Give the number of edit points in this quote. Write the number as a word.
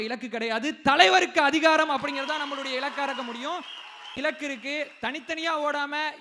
one